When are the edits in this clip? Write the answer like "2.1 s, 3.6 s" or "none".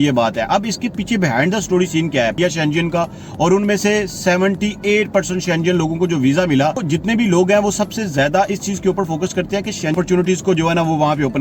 2.6 s, 6.8 s, 10.0 s